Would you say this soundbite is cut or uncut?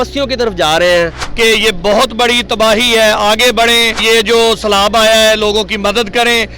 cut